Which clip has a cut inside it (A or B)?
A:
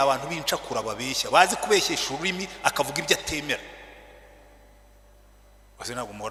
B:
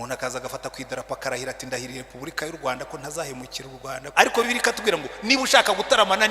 B